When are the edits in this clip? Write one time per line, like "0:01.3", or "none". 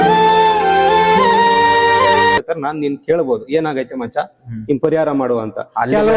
0:02.4